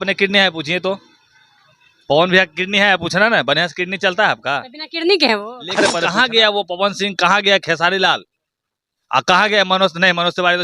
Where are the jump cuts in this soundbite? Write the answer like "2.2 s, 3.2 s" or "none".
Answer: 6.0 s